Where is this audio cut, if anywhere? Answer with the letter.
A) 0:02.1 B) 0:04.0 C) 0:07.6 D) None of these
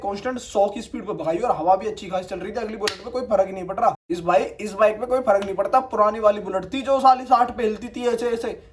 B